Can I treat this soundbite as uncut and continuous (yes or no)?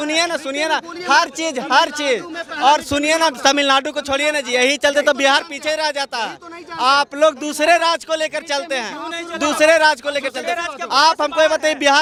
yes